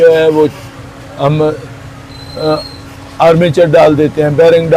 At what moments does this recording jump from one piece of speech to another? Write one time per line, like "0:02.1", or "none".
none